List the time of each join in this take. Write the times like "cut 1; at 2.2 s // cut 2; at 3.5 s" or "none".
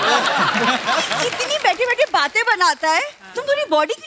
cut 1; at 1.3 s